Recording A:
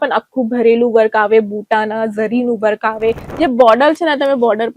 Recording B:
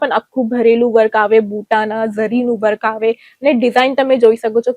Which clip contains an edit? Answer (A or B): A